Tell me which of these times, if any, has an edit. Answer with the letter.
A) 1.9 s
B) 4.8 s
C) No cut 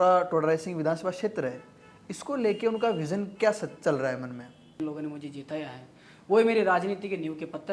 B